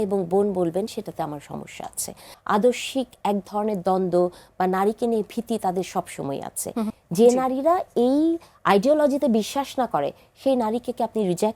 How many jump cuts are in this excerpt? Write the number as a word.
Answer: two